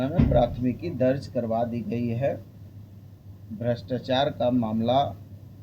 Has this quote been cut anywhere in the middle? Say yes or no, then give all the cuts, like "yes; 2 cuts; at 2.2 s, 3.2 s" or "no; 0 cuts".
no; 0 cuts